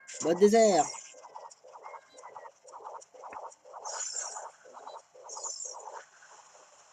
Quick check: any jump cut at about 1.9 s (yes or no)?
no